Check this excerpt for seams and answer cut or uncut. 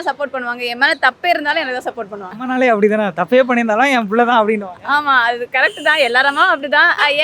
uncut